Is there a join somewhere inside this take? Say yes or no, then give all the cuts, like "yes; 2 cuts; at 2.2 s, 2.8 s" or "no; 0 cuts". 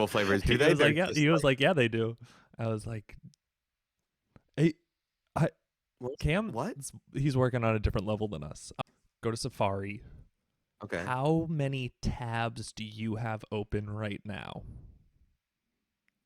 yes; 1 cut; at 8.7 s